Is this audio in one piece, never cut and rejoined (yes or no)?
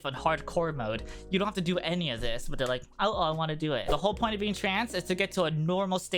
no